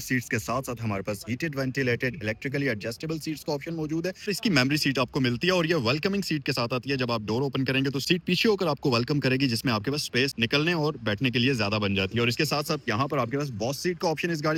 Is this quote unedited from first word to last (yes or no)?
yes